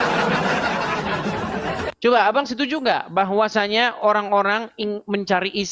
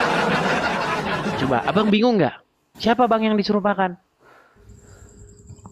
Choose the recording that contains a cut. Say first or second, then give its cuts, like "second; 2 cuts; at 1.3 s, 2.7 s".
second; 1 cut; at 1.3 s